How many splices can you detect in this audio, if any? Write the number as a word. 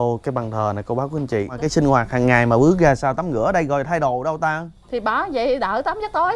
one